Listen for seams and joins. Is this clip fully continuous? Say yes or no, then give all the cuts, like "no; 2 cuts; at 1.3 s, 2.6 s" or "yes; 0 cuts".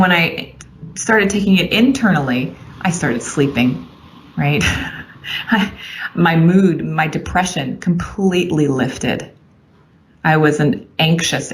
yes; 0 cuts